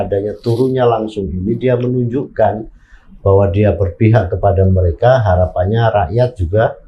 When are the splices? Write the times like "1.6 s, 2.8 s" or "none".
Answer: none

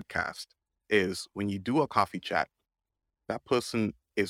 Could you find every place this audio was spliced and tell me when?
3.3 s

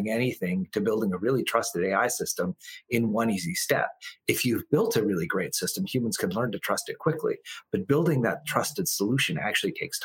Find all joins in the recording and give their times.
none

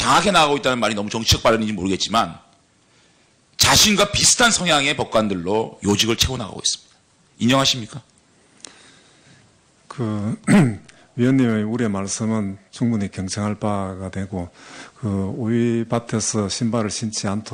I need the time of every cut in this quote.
none

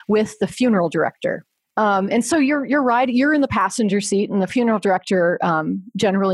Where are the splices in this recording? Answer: 1.5 s

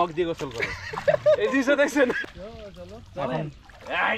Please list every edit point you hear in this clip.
2.2 s

